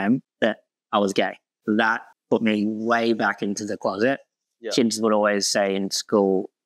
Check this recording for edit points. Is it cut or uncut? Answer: cut